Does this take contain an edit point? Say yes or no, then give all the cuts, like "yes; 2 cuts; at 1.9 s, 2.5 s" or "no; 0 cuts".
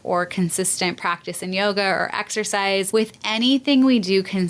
yes; 1 cut; at 2.9 s